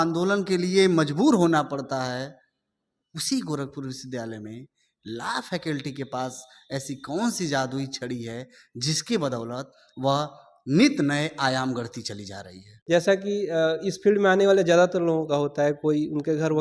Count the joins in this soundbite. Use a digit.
1